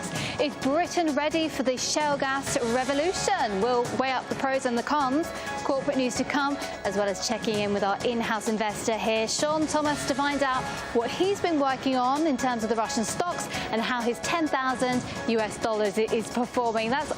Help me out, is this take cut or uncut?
cut